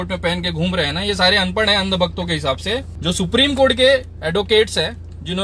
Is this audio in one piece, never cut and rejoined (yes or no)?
no